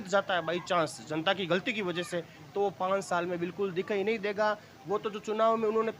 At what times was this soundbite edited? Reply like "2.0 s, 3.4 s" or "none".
none